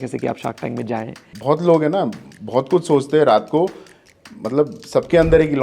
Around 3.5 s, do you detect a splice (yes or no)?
no